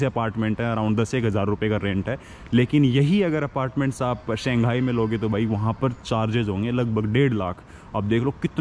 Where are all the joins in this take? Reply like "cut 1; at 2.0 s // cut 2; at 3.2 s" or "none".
none